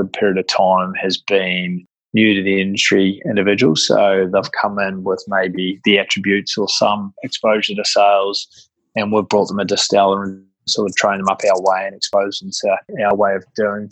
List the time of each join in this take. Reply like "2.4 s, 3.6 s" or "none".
11.9 s, 13.1 s